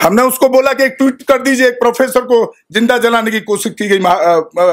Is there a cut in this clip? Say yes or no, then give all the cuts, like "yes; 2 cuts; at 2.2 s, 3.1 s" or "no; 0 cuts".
no; 0 cuts